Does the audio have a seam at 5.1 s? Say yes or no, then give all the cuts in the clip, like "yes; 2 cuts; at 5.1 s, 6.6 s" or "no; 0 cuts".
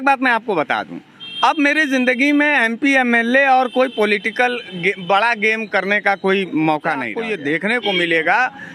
no; 1 cut; at 7.2 s